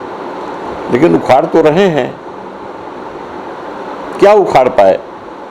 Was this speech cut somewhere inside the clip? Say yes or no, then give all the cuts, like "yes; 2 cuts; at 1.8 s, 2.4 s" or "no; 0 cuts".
no; 0 cuts